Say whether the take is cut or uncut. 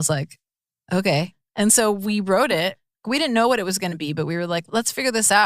cut